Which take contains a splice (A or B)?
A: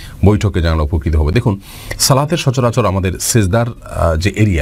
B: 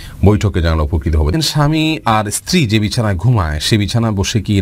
B